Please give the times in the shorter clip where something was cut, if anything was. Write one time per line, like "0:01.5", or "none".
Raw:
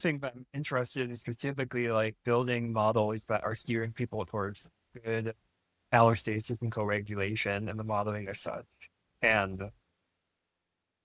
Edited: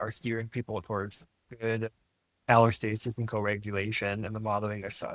none

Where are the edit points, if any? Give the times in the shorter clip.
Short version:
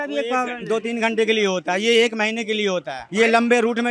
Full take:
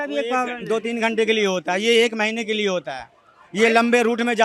0:03.0

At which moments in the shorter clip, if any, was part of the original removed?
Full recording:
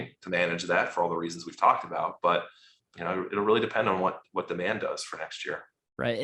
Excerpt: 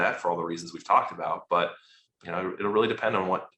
none

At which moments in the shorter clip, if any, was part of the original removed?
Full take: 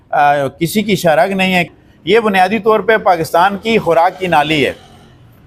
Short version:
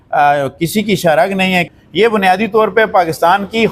0:01.8

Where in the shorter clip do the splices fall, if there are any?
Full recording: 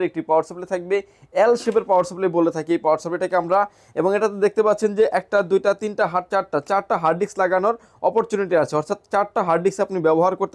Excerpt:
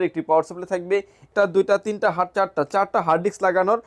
0:01.3

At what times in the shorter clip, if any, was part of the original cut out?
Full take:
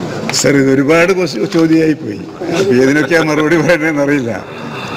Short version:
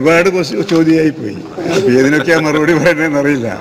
none

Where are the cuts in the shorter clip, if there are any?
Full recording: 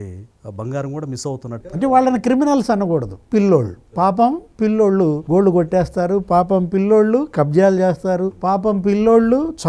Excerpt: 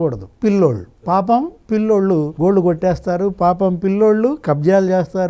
none

